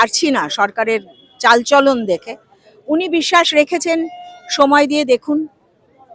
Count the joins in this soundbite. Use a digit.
0